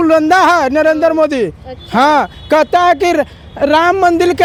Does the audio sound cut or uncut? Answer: uncut